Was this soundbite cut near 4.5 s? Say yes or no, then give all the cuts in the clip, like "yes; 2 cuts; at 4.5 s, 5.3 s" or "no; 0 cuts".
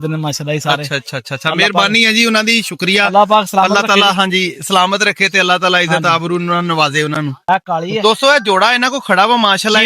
no; 1 cut; at 7.4 s